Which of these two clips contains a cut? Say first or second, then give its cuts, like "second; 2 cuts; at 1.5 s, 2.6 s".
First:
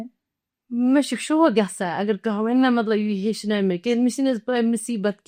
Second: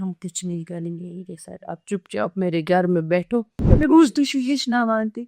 second; 1 cut; at 3.6 s